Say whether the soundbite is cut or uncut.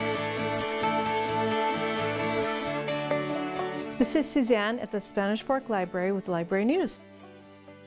cut